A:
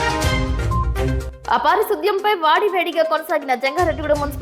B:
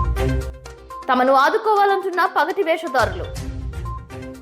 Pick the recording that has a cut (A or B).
B